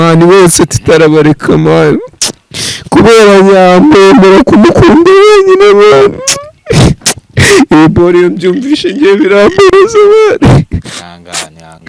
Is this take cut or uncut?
uncut